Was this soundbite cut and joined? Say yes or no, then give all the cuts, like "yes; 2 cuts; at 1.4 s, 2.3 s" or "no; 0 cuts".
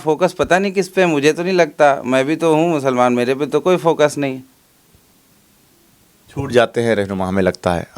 no; 0 cuts